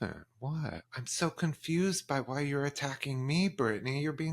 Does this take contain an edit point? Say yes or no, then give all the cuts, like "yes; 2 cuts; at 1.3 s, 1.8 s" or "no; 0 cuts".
yes; 1 cut; at 1.0 s